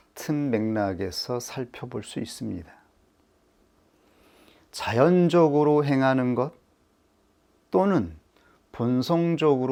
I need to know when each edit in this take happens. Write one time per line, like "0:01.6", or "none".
none